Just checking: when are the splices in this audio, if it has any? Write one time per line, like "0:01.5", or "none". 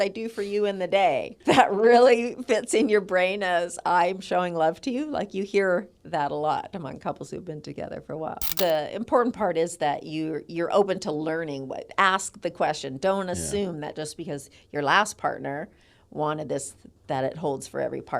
0:01.3
0:06.0
0:08.4